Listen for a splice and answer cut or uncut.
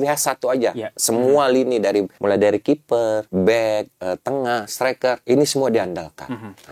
cut